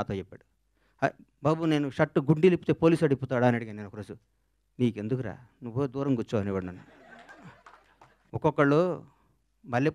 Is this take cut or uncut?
cut